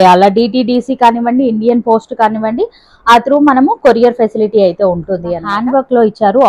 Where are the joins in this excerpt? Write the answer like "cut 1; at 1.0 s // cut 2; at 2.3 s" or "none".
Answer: cut 1; at 5.5 s